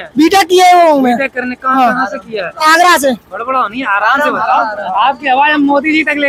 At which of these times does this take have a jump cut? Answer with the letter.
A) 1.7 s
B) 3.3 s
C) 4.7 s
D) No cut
D